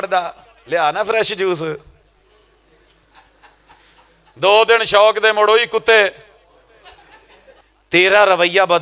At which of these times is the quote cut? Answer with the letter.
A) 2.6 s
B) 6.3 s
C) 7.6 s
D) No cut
C